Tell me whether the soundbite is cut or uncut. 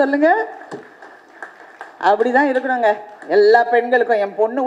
uncut